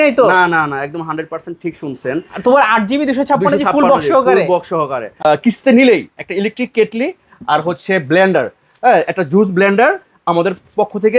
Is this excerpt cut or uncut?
cut